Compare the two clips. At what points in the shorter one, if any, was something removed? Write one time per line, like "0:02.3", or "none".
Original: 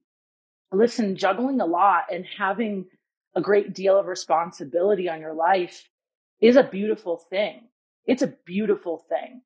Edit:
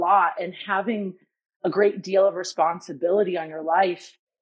none